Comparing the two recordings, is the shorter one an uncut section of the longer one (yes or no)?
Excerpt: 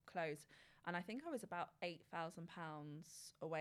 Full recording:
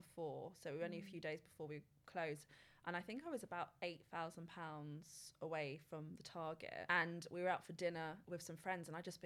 yes